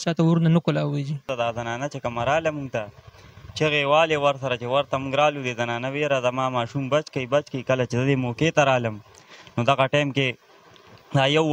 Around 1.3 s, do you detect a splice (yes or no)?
yes